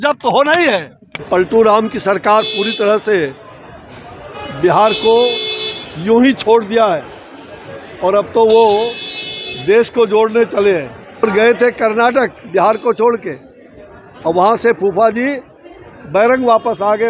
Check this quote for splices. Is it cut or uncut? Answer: cut